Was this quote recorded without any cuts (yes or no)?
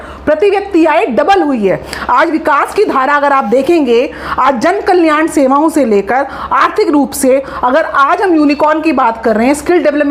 yes